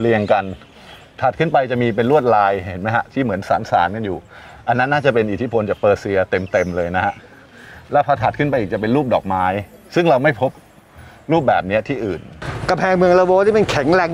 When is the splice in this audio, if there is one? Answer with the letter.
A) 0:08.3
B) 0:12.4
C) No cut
B